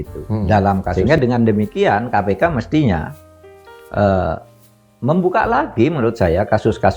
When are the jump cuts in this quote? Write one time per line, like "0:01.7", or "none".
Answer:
0:00.9